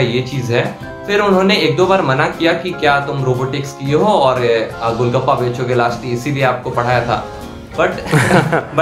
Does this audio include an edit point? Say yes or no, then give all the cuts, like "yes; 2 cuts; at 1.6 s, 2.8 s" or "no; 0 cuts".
no; 0 cuts